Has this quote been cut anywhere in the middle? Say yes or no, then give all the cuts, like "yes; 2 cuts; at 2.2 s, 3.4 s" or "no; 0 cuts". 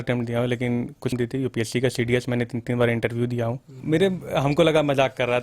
yes; 2 cuts; at 1.1 s, 3.8 s